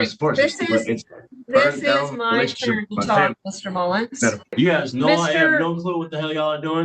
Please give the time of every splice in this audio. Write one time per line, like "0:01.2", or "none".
0:04.5